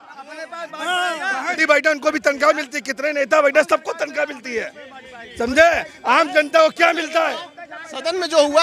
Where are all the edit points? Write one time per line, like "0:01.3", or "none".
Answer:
0:01.6

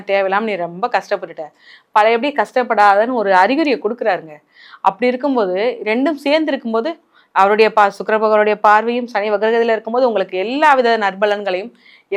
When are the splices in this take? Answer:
none

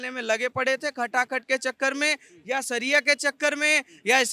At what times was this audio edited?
none

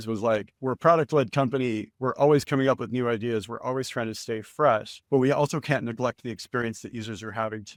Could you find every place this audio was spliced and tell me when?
none

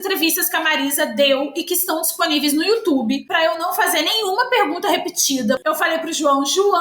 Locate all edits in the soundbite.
0:05.6

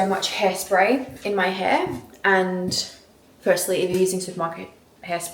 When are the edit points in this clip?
none

